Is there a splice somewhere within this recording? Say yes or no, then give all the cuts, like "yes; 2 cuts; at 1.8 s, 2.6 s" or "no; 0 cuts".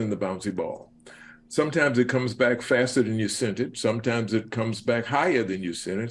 no; 0 cuts